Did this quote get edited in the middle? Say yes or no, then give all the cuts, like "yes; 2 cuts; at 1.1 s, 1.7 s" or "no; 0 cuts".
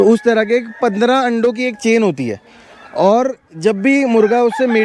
no; 0 cuts